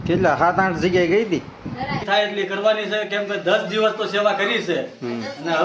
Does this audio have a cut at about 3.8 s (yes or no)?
no